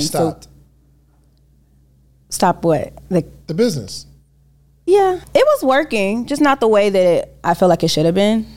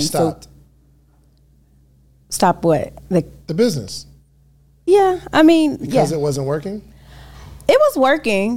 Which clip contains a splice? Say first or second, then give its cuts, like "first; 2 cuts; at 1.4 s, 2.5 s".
first; 1 cut; at 5.2 s